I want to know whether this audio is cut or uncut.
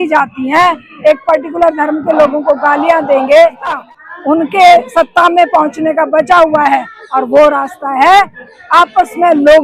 cut